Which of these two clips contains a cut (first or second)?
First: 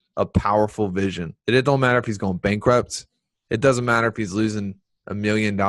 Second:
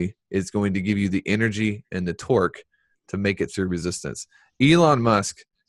first